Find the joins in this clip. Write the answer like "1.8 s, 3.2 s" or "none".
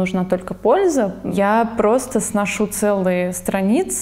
1.3 s